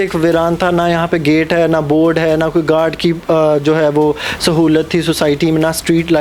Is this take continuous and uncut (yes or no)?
yes